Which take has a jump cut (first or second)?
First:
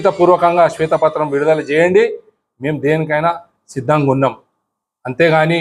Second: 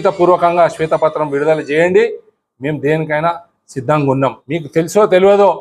second